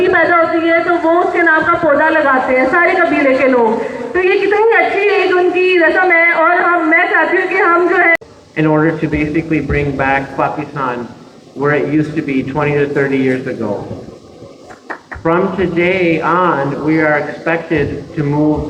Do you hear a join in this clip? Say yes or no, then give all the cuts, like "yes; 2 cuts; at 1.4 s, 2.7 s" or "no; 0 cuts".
yes; 1 cut; at 8.1 s